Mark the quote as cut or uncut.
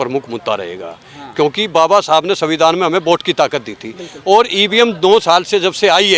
uncut